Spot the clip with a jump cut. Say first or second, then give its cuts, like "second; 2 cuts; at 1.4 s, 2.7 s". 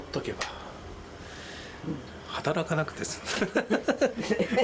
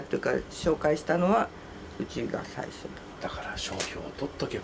second; 1 cut; at 3.1 s